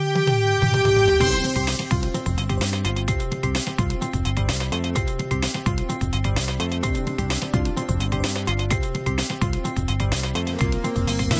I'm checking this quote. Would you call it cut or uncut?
uncut